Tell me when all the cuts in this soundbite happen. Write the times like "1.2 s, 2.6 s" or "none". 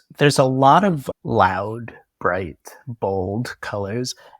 1.1 s